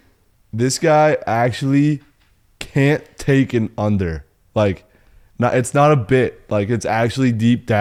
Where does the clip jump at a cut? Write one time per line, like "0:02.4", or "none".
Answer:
none